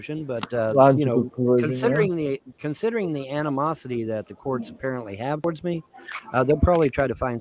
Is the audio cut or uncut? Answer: uncut